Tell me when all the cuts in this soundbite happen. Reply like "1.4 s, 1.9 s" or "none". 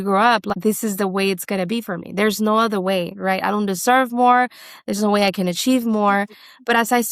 none